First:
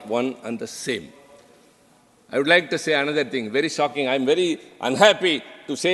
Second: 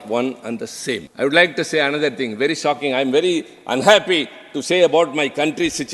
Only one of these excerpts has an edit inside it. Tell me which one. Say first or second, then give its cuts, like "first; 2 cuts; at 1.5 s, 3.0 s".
second; 1 cut; at 1.1 s